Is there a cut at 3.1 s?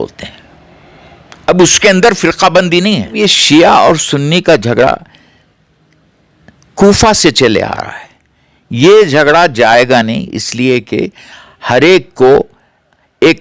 yes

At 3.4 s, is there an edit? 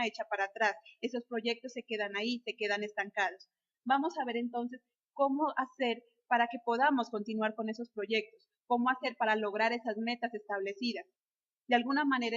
no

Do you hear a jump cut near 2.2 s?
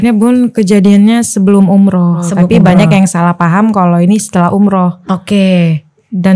yes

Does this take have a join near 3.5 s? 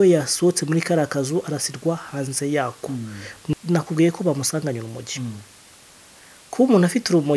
yes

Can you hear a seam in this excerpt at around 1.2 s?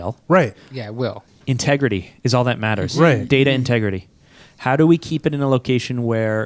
yes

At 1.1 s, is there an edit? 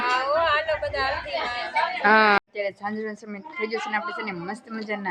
no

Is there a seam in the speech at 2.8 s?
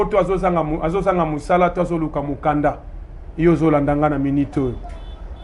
no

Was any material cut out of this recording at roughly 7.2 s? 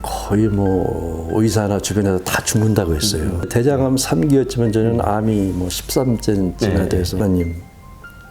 yes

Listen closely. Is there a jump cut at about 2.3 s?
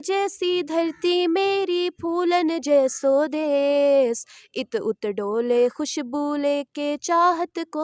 no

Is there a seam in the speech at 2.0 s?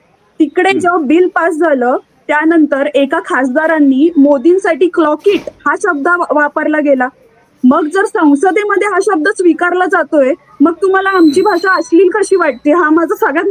no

